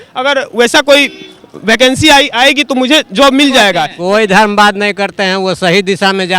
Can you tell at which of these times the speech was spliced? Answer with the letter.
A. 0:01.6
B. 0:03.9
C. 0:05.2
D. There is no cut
B